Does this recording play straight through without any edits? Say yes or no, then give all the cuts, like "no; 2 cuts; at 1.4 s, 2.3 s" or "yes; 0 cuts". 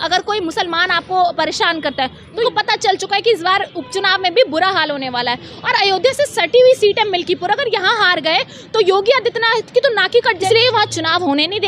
no; 2 cuts; at 2.4 s, 10.4 s